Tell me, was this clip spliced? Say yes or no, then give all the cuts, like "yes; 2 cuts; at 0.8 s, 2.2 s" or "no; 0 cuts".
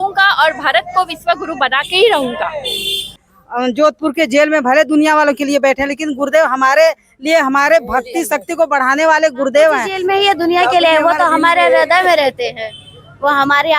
yes; 2 cuts; at 3.3 s, 9.9 s